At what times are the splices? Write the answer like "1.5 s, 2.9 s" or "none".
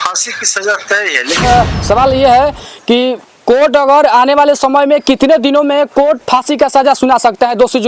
1.4 s